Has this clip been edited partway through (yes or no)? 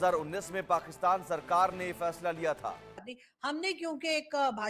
yes